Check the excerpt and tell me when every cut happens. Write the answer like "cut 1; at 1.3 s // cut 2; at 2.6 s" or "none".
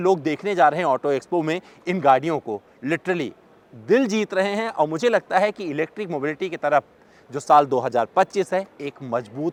none